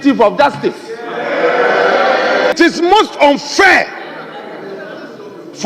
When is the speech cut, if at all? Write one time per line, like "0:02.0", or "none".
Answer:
0:02.5